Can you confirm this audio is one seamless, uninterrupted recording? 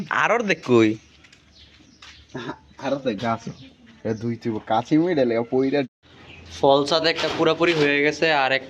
no; 1 cut; at 5.9 s

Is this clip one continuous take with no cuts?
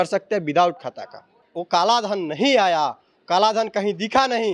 no; 1 cut; at 1.5 s

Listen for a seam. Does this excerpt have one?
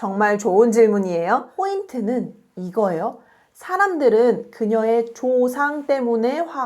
yes; 1 cut; at 1.5 s

